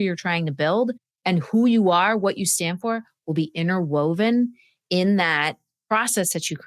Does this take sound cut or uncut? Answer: cut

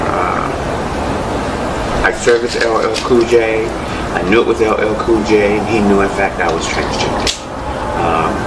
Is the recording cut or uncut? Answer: uncut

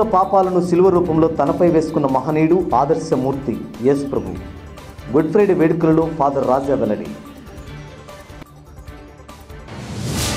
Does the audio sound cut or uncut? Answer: uncut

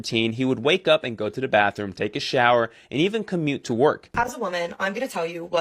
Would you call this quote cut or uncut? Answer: cut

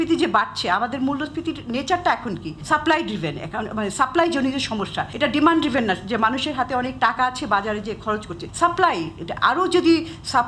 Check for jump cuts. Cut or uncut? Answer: cut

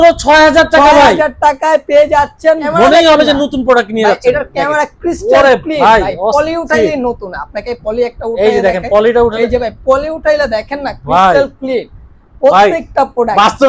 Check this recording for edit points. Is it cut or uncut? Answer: cut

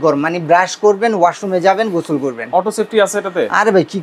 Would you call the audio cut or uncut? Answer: uncut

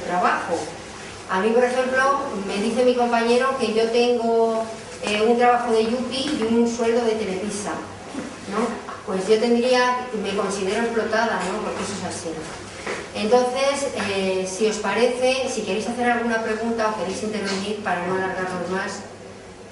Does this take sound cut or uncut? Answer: uncut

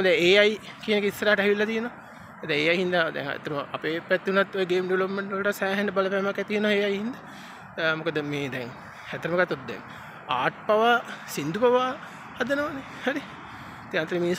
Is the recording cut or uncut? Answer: uncut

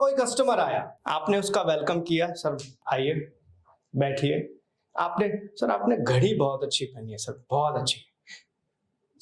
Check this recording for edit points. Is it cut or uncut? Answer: cut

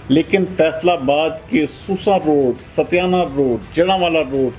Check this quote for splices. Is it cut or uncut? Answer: uncut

